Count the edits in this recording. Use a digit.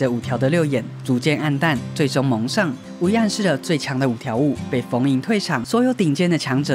2